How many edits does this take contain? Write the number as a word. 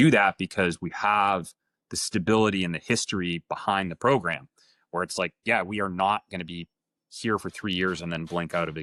zero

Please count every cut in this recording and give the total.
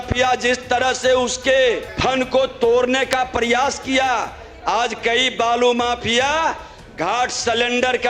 one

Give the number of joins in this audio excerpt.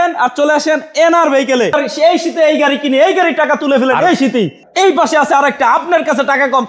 two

